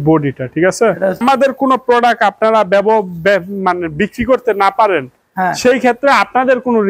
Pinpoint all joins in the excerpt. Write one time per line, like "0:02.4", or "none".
0:01.2